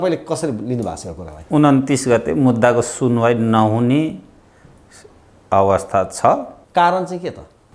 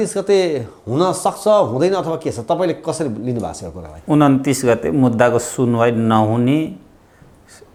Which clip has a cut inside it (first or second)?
first